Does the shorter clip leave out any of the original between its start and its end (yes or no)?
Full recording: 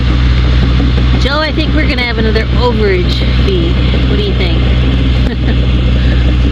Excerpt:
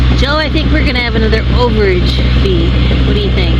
no